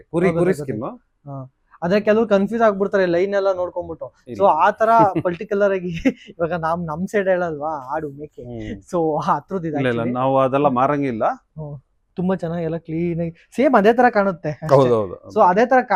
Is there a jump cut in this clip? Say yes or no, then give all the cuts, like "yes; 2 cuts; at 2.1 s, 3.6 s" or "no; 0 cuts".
no; 0 cuts